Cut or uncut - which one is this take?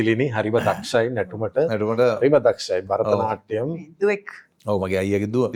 uncut